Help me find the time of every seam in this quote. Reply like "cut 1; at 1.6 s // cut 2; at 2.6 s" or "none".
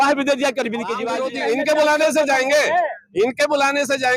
cut 1; at 1.0 s